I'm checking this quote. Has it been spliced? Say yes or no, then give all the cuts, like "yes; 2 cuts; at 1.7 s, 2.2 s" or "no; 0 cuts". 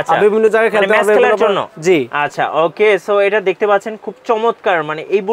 no; 0 cuts